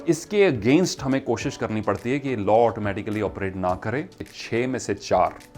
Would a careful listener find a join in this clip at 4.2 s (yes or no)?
yes